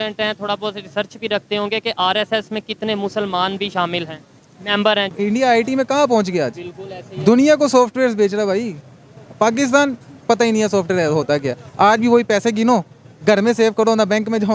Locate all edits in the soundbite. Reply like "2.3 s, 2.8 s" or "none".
5.2 s